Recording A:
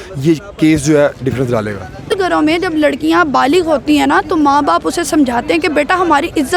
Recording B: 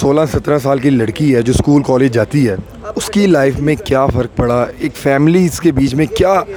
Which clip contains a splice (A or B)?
A